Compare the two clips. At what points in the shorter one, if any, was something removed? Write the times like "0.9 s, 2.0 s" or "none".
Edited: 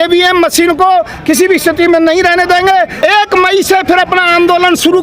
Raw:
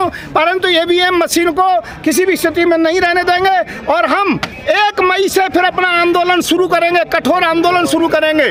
2.9 s